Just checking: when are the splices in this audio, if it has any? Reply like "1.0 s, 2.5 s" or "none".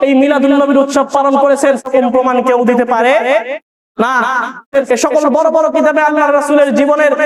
1.8 s, 4.7 s